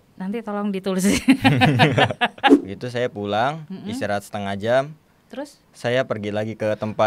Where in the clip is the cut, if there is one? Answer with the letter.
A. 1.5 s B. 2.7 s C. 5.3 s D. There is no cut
B